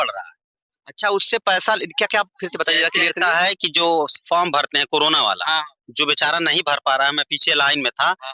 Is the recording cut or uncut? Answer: uncut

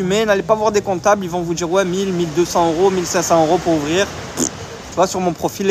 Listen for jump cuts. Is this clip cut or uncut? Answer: uncut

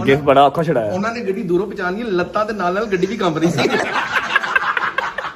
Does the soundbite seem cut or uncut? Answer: cut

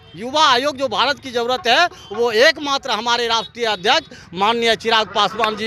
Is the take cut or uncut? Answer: uncut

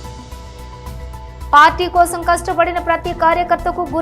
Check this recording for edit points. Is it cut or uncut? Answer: cut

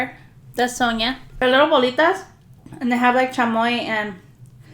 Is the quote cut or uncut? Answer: cut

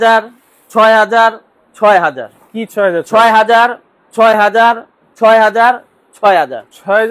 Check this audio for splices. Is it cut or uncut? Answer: uncut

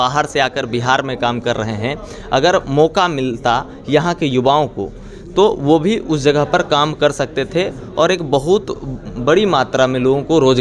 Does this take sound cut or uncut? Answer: uncut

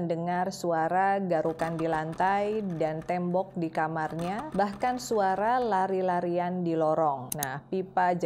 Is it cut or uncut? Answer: uncut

